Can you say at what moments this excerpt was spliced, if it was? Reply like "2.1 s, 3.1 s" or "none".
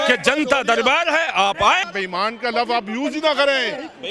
1.8 s

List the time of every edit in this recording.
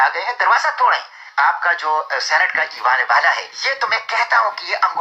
1.2 s, 3.5 s

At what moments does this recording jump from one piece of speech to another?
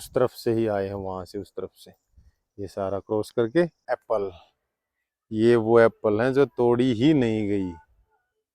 3.8 s

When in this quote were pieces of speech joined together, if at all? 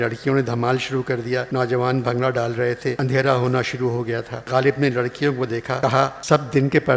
1.5 s, 3.0 s, 4.3 s, 6.1 s

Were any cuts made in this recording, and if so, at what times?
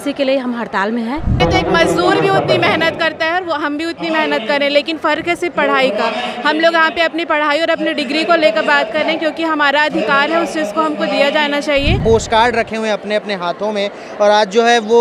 1.4 s, 12.0 s

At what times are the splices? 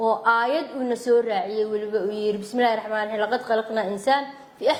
none

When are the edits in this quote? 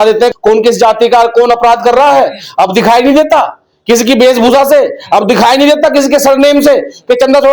none

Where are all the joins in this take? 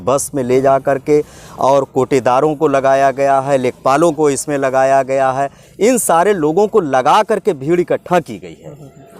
none

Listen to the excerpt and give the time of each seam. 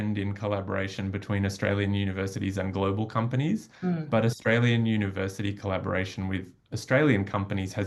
none

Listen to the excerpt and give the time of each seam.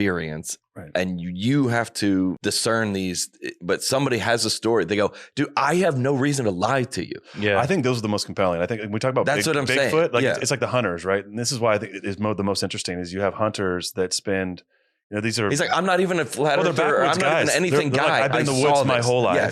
2.4 s

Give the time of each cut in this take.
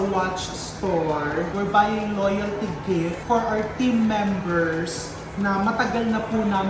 1.5 s, 3.2 s

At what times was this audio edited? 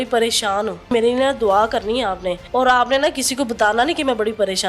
0.9 s, 2.4 s

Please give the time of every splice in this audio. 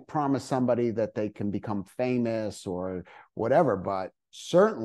none

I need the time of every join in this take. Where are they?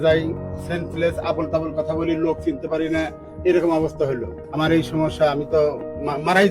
4.3 s

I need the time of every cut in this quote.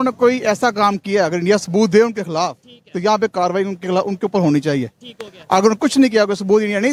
none

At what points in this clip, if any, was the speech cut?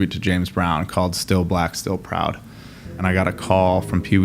3.0 s

